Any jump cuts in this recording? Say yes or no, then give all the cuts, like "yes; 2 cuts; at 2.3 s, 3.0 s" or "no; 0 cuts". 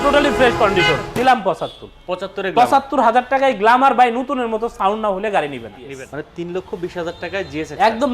yes; 2 cuts; at 1.1 s, 5.8 s